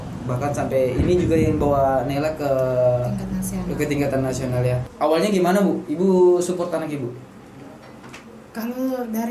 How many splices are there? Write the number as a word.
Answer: one